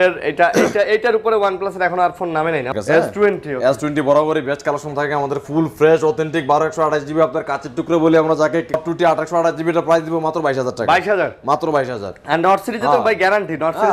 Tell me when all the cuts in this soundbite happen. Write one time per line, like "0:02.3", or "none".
0:02.7
0:08.8